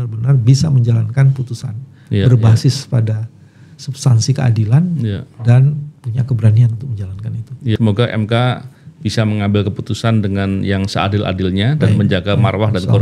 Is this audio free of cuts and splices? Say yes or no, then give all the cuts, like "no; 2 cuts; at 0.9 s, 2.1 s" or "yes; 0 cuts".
no; 1 cut; at 7.8 s